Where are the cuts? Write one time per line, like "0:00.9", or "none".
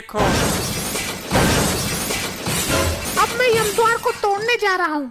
0:03.0